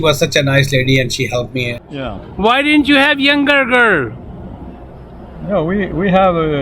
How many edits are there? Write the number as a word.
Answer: one